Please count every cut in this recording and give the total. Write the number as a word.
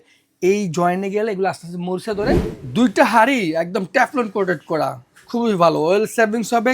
one